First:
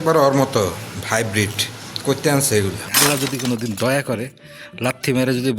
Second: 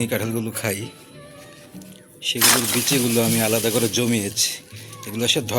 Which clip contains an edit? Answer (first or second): first